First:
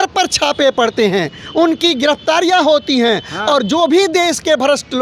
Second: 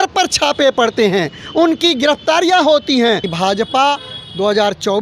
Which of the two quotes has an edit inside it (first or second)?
second